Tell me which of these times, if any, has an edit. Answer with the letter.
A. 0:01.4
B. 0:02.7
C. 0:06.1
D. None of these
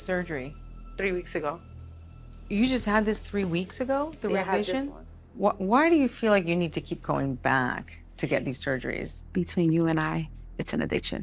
D